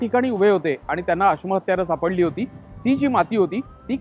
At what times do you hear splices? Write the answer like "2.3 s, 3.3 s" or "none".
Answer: none

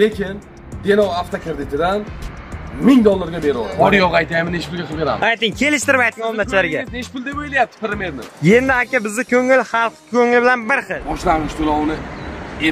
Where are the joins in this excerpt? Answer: 3.7 s, 11.0 s

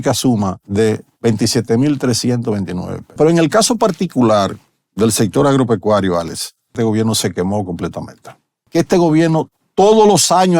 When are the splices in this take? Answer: 3.1 s, 6.8 s, 8.6 s

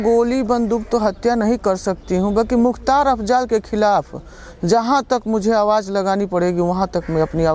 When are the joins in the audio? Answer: none

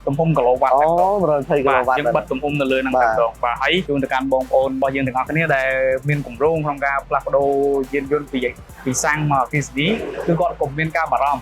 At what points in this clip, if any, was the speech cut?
3.8 s, 4.8 s

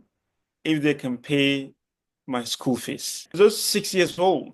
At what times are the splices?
3.3 s

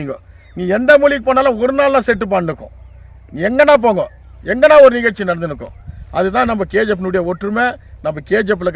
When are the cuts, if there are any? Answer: none

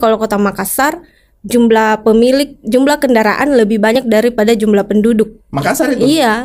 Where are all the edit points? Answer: none

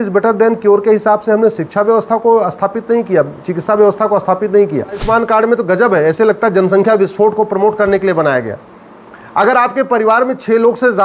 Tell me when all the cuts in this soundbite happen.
5.0 s

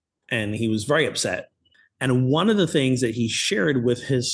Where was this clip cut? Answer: 1.7 s

